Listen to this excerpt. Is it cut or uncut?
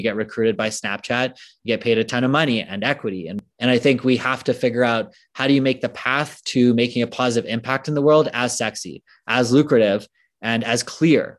cut